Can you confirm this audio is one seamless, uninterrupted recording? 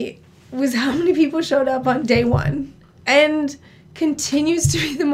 no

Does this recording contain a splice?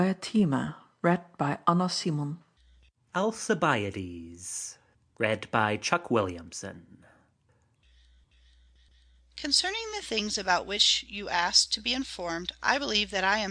yes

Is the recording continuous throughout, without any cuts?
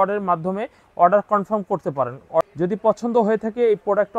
no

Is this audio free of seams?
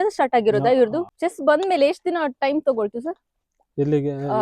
no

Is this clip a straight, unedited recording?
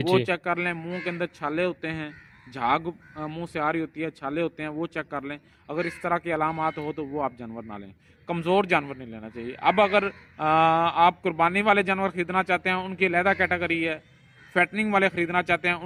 yes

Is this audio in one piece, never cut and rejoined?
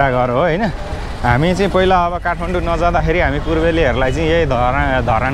yes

